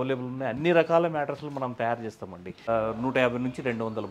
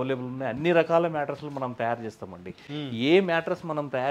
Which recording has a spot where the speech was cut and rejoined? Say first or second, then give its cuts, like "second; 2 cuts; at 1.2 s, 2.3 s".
first; 1 cut; at 2.7 s